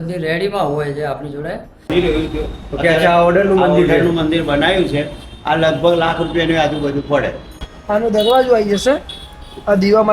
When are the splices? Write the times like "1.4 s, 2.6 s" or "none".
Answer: 1.9 s, 7.4 s